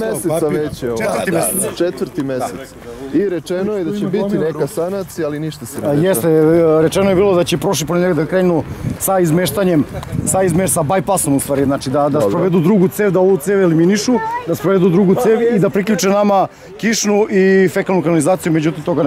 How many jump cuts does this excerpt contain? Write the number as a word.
zero